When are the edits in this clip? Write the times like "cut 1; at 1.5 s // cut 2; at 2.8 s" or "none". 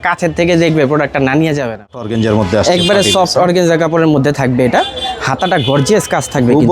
cut 1; at 2.0 s